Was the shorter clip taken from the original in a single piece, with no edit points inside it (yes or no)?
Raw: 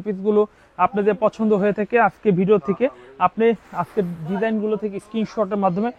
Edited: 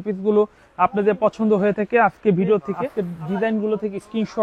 no